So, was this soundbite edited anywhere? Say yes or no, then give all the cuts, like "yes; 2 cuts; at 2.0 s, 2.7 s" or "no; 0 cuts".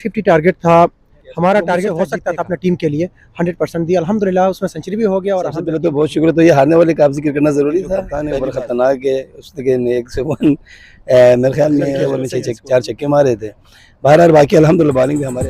yes; 4 cuts; at 2.0 s, 5.7 s, 8.2 s, 12.1 s